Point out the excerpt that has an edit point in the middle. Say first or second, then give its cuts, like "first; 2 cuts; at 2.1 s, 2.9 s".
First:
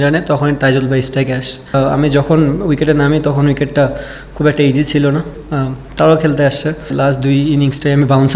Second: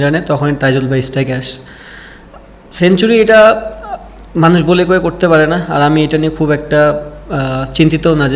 first; 3 cuts; at 1.7 s, 5.4 s, 6.9 s